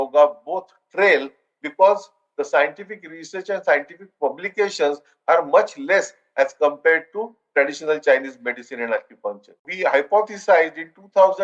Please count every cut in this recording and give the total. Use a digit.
1